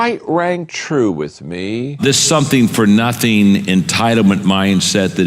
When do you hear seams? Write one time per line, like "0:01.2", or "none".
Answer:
0:02.0